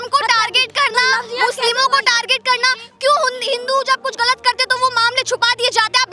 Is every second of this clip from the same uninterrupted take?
yes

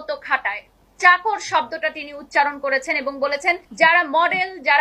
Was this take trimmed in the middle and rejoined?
yes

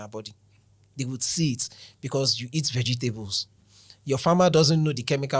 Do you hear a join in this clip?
no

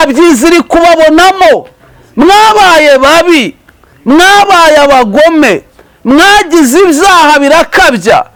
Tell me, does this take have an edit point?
no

